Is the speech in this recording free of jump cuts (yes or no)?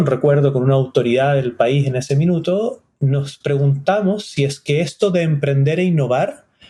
yes